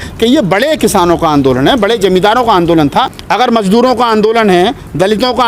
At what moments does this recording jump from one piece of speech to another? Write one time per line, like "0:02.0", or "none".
0:03.2